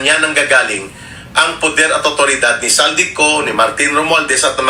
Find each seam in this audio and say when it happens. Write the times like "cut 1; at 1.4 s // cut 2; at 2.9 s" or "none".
none